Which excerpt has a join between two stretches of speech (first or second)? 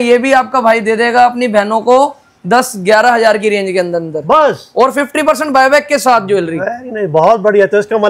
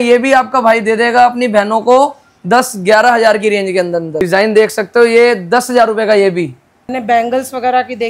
second